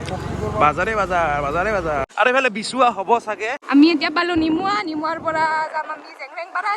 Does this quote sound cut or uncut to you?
cut